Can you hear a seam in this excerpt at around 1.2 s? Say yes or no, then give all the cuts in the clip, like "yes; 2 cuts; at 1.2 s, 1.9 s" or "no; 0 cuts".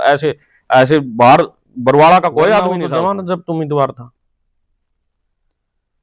no; 1 cut; at 2.8 s